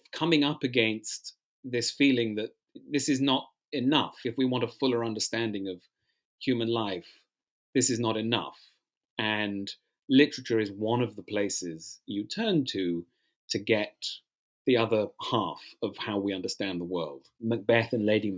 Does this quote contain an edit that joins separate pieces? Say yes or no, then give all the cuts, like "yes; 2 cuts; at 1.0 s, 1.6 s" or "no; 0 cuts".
yes; 1 cut; at 17.2 s